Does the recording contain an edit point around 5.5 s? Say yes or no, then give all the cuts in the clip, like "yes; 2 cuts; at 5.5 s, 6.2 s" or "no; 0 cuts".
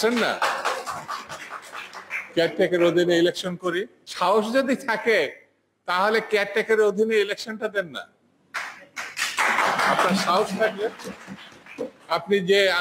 no; 1 cut; at 4.0 s